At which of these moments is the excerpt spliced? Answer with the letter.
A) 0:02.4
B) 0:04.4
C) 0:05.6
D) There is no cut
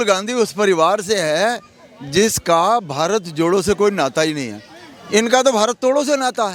D